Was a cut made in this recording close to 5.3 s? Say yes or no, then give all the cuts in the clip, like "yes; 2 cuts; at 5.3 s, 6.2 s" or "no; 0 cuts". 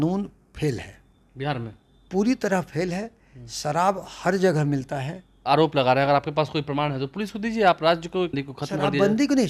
yes; 2 cuts; at 5.3 s, 8.5 s